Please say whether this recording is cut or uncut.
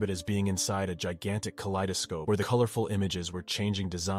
cut